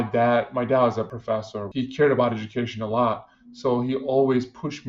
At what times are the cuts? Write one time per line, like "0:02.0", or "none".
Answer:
0:01.1